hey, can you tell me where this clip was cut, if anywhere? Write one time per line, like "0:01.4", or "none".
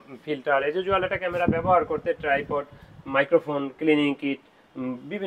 none